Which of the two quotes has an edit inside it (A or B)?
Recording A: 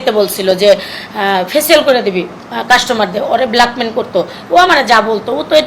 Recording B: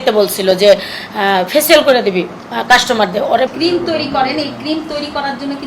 B